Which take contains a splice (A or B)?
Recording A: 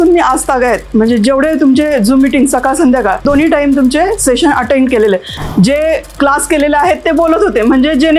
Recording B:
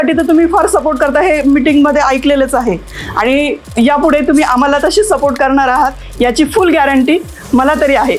A